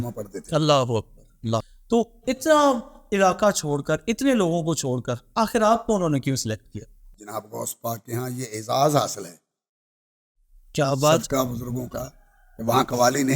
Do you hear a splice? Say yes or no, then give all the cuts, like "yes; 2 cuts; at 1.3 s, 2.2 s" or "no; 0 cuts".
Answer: yes; 2 cuts; at 1.7 s, 7.1 s